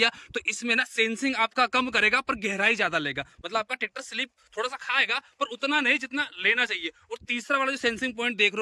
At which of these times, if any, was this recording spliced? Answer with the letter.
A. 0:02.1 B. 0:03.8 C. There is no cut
C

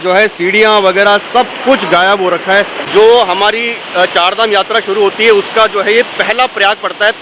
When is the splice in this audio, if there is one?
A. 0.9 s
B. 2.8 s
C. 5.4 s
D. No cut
B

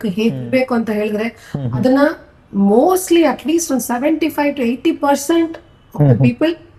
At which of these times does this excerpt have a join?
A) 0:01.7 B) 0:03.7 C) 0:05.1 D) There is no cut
D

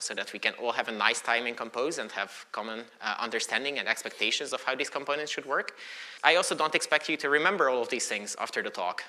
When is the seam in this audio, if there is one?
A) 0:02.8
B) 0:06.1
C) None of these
B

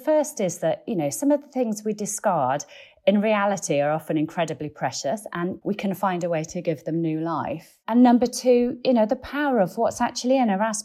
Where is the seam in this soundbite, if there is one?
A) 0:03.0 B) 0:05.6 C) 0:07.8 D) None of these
B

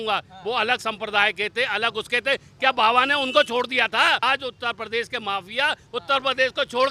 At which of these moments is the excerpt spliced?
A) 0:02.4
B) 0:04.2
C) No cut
B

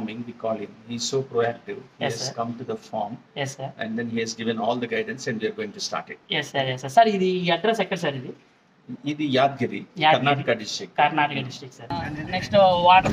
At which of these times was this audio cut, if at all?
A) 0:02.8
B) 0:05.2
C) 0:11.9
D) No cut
C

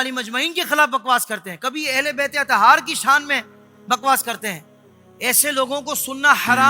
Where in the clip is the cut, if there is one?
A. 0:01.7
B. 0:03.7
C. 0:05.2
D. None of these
D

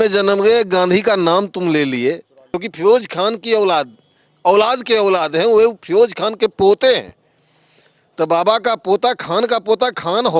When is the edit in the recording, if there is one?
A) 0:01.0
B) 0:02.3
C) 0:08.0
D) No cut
B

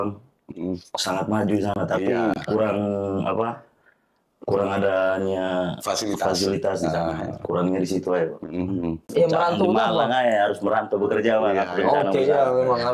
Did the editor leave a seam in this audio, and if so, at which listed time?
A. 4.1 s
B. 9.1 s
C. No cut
B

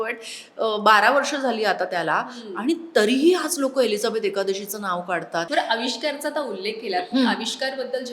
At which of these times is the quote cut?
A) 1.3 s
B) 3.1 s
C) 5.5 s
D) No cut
C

